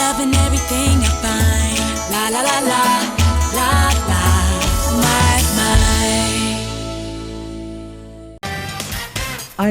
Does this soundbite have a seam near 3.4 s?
no; 1 cut; at 8.4 s

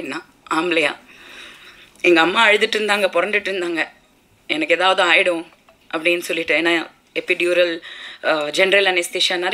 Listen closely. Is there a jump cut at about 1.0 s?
no; 0 cuts

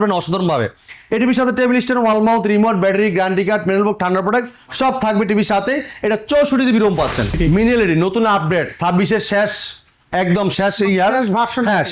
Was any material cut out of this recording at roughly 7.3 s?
yes; 1 cut; at 7.3 s

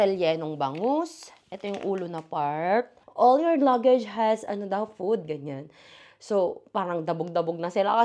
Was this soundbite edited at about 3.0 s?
yes; 1 cut; at 3.0 s

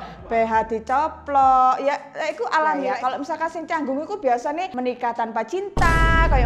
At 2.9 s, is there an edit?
yes; 2 cuts; at 2.9 s, 4.7 s

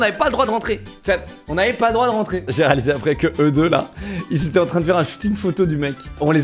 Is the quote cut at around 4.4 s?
no; 1 cut; at 2.5 s

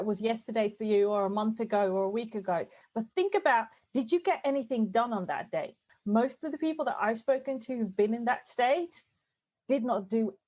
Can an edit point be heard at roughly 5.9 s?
yes; 2 cuts; at 2.8 s, 5.9 s

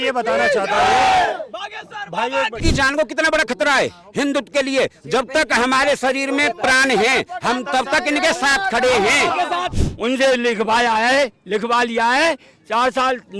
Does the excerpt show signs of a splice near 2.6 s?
yes; 2 cuts; at 2.6 s, 9.7 s

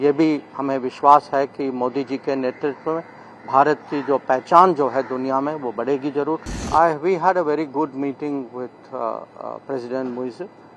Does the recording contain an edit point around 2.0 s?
no; 1 cut; at 6.6 s

